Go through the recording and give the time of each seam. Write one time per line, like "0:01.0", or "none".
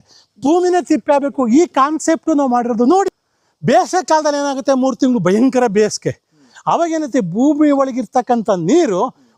0:03.1

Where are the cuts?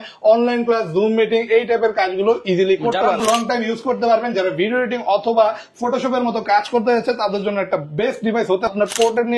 0:03.2
0:08.7

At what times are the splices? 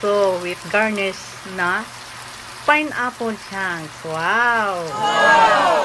0:04.9

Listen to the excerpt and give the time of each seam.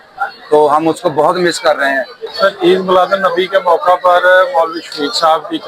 0:02.2

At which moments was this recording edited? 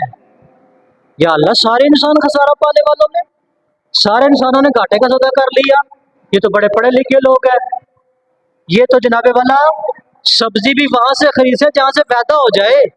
none

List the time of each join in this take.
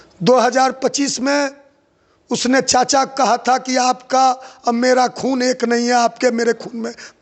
none

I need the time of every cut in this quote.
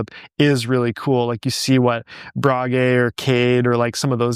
none

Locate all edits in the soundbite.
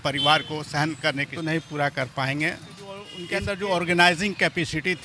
0:01.3
0:03.1

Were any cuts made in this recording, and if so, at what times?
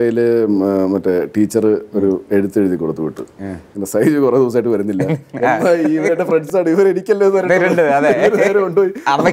none

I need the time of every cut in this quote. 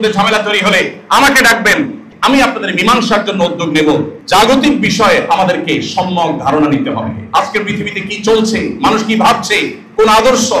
0:02.1
0:04.1

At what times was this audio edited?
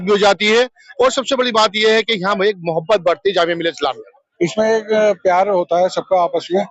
0:04.1

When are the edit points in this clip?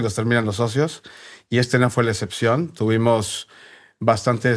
none

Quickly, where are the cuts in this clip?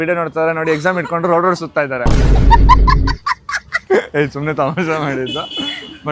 none

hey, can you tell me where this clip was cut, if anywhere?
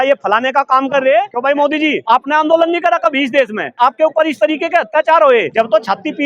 0:01.7
0:03.7
0:05.5

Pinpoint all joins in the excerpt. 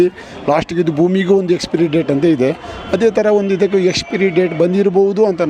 none

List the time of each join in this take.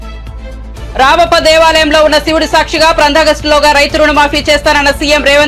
none

